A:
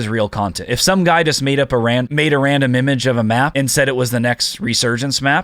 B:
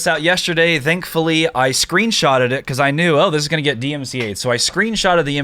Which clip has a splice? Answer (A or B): A